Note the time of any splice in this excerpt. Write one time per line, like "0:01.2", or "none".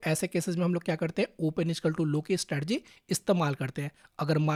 none